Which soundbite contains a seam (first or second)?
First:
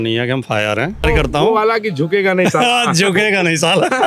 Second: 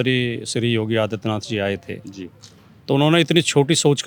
first